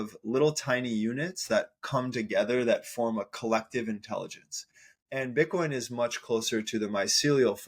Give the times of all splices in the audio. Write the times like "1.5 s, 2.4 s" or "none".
4.8 s